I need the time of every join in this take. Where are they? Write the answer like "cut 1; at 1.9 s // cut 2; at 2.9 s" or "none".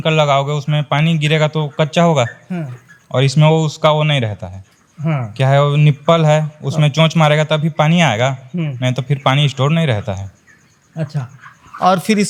none